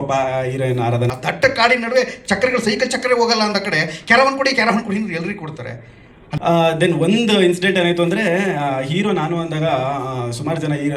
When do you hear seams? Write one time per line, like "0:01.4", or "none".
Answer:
0:01.1
0:06.3